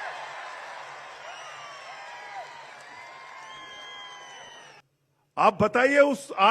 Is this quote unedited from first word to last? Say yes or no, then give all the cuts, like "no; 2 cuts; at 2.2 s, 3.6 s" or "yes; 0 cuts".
no; 1 cut; at 4.8 s